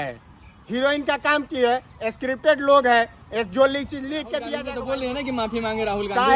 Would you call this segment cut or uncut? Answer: cut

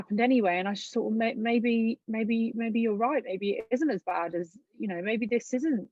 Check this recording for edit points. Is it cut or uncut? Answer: uncut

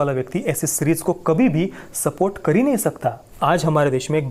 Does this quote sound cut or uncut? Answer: cut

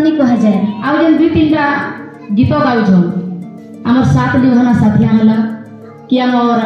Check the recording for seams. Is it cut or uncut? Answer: cut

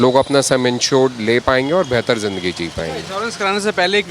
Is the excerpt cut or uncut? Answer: uncut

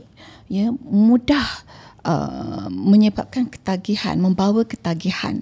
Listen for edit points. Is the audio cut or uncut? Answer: uncut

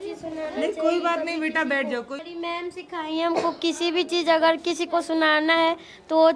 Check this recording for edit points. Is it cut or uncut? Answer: cut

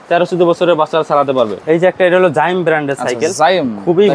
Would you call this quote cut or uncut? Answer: cut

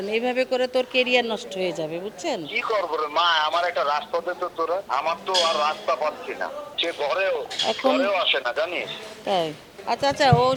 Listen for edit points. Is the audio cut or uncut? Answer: uncut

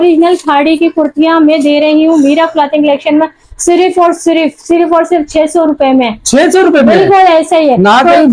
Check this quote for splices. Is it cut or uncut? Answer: uncut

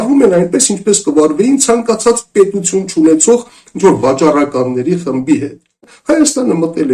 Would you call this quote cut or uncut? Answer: cut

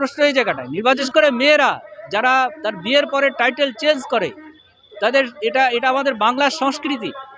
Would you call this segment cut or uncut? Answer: cut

